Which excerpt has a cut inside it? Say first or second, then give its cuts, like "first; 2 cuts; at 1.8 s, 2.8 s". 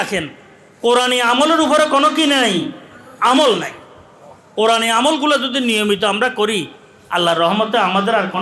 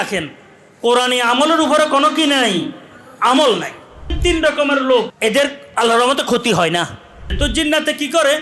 second; 3 cuts; at 4.2 s, 5.1 s, 7.3 s